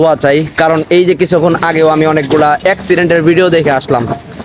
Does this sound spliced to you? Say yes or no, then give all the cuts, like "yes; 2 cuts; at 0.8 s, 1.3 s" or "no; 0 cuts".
no; 0 cuts